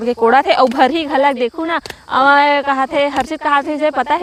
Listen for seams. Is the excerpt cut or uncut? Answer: uncut